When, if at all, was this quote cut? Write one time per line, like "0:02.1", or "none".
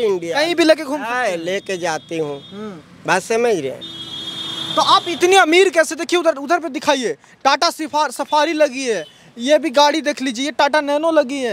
none